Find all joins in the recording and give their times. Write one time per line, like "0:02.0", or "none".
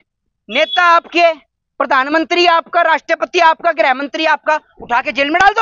none